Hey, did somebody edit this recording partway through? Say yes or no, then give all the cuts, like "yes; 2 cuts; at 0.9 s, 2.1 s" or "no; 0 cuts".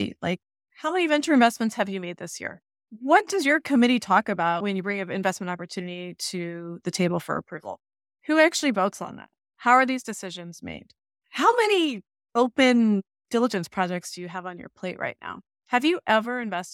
no; 0 cuts